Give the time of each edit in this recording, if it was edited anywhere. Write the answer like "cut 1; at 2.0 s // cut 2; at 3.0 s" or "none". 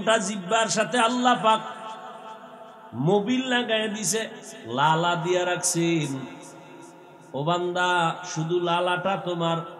none